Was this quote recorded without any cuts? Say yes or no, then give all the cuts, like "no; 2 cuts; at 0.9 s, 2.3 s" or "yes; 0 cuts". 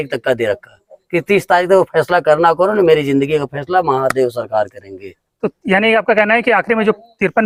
yes; 0 cuts